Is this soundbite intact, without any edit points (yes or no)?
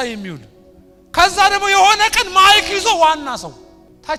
yes